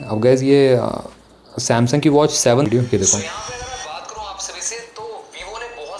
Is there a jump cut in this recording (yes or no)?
yes